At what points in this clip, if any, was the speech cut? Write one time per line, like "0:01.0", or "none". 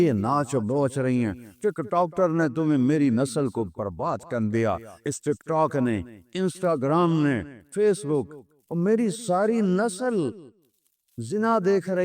0:06.3
0:07.6

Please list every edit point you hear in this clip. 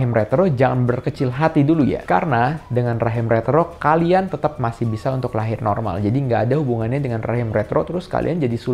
none

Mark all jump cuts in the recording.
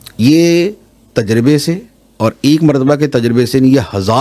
none

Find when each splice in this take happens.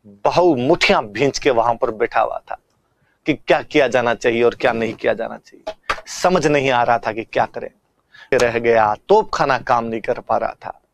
0:08.2

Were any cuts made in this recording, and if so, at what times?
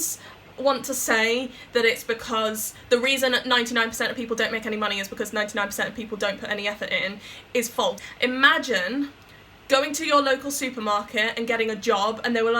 0:08.0

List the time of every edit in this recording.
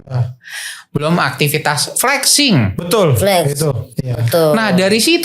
0:03.9

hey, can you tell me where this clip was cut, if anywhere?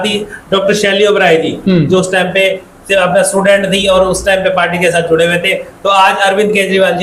none

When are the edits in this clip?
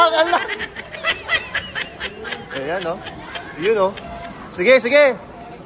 0:01.0

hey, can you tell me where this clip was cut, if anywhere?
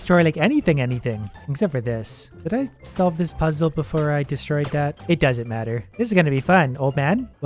none

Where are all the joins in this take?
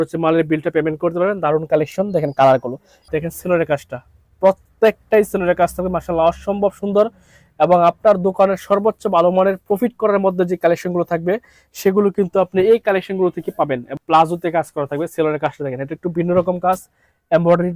0:03.0
0:13.9

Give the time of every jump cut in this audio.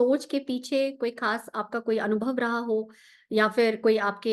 none

